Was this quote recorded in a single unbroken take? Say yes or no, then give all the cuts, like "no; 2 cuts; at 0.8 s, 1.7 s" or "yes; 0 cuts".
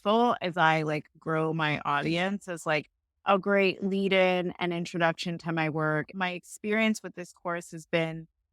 no; 1 cut; at 6.1 s